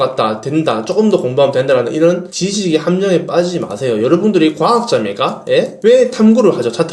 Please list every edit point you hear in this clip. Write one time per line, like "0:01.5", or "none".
0:05.7